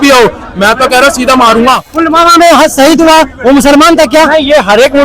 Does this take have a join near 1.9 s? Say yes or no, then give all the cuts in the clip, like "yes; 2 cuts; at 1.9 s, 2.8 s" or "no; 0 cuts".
yes; 1 cut; at 1.9 s